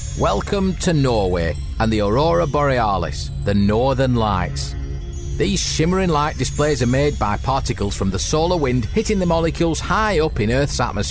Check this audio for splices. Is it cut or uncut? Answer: uncut